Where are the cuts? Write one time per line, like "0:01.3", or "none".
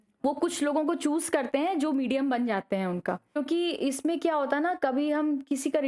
0:03.4